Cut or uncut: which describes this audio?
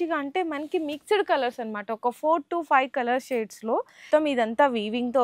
cut